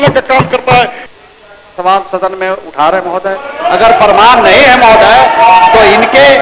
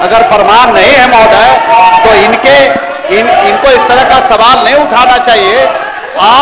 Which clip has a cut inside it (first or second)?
first